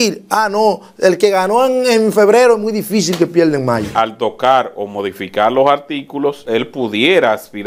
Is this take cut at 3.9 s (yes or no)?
yes